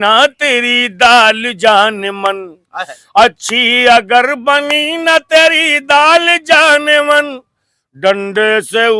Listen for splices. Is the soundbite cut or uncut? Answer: uncut